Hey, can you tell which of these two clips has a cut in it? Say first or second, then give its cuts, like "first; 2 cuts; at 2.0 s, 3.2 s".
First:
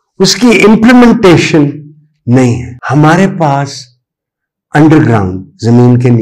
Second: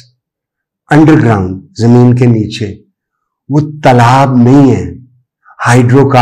first; 1 cut; at 2.7 s